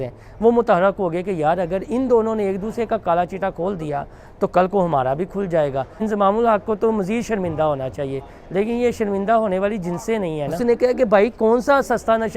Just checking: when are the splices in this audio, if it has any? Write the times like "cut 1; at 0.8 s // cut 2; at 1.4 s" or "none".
cut 1; at 6.0 s // cut 2; at 10.5 s